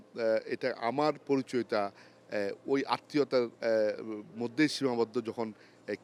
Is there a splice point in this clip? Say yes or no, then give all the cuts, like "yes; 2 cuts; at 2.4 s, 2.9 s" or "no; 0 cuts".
no; 0 cuts